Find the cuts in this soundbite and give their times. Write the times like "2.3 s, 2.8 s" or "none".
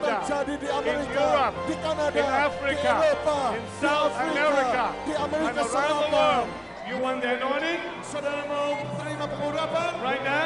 2.0 s